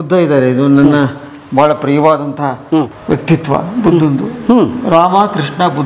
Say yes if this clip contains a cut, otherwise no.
no